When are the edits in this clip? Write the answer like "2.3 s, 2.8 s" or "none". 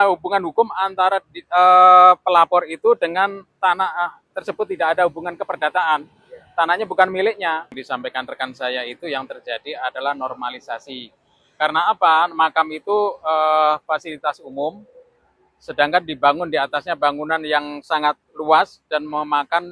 7.7 s